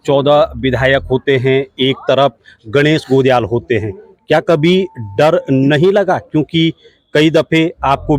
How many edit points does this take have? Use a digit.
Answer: 0